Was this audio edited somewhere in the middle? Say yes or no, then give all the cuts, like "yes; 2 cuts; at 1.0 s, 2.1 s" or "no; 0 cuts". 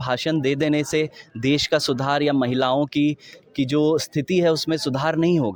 no; 0 cuts